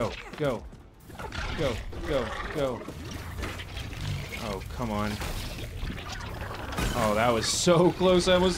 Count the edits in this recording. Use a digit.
1